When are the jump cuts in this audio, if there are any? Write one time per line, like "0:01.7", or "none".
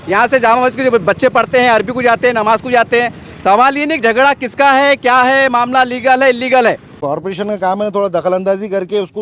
0:07.0

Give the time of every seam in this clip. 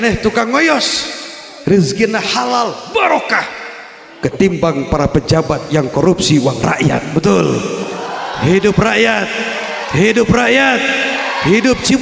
none

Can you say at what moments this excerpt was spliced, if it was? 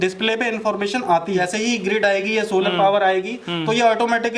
0:01.4

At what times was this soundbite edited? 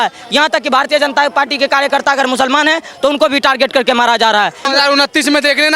0:04.7

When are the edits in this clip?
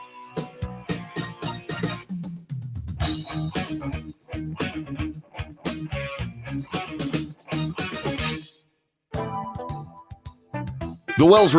none

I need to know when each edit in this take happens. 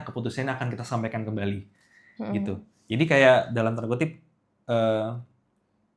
none

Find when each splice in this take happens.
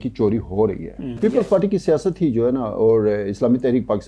0:01.1

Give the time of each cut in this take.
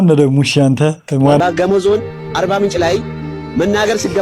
0:01.4

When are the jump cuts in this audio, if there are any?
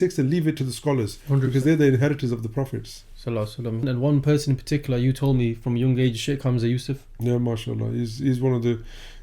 none

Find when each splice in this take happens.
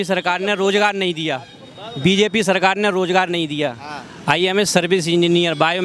none

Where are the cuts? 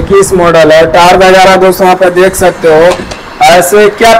none

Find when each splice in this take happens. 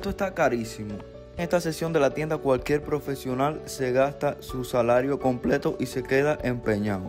0:01.4

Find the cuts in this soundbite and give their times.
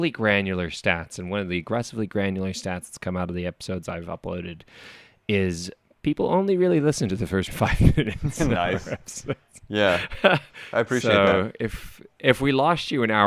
0:07.5

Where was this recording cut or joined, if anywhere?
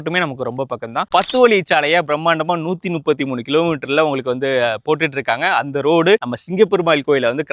0:01.1

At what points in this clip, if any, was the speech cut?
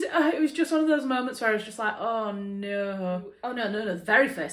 0:03.4

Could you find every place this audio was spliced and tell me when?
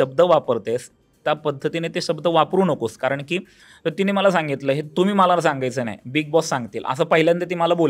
none

